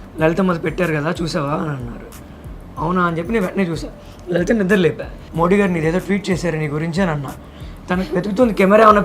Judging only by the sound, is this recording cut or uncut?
cut